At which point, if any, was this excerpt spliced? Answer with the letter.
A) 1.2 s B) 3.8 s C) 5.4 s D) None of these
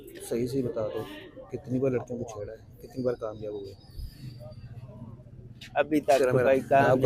D